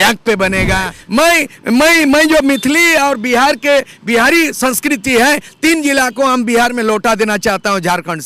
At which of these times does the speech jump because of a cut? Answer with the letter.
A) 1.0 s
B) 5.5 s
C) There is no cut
A